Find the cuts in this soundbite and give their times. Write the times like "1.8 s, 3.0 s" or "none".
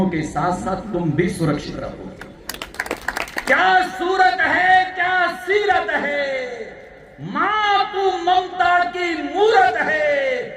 3.4 s